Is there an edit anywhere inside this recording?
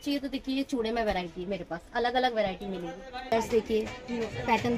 yes; 1 cut; at 3.3 s

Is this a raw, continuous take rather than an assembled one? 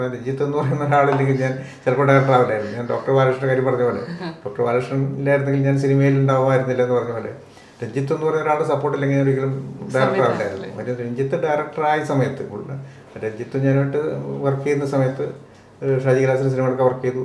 yes; 0 cuts

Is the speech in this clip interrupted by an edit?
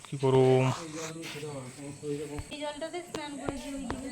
yes; 1 cut; at 2.5 s

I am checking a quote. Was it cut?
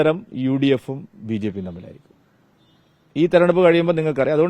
no; 0 cuts

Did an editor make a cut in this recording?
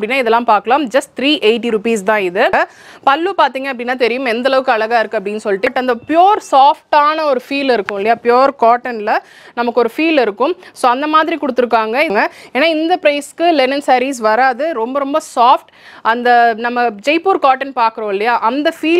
yes; 3 cuts; at 2.5 s, 5.7 s, 12.1 s

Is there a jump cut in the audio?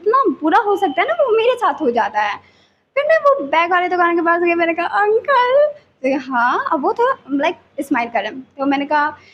no; 0 cuts

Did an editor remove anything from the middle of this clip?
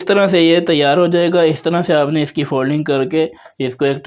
no; 0 cuts

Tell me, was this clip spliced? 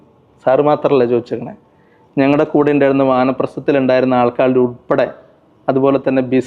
no; 0 cuts

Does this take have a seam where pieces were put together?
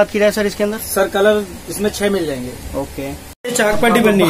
yes; 1 cut; at 3.3 s

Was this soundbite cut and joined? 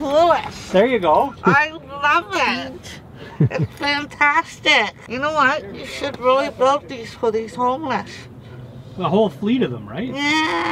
yes; 1 cut; at 5.0 s

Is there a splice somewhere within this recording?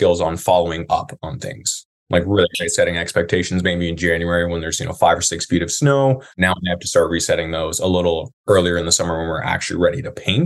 yes; 1 cut; at 6.3 s

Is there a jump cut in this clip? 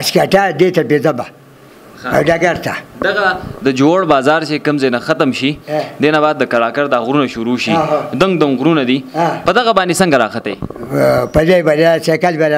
no; 0 cuts

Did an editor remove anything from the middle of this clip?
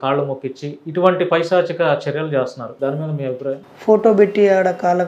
yes; 2 cuts; at 2.6 s, 3.7 s

